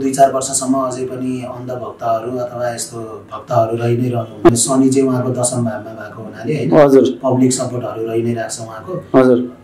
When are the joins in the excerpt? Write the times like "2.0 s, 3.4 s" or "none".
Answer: 4.5 s